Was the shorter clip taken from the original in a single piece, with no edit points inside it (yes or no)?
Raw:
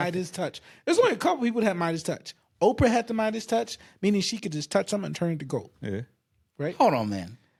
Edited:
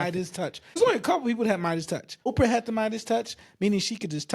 no